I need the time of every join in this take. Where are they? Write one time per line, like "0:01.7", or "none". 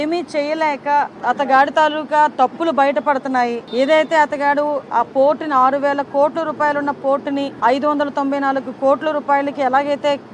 0:01.1
0:03.6
0:07.5